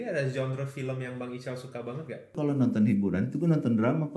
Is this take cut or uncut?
cut